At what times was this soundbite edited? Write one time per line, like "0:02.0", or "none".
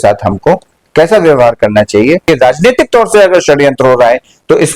0:02.3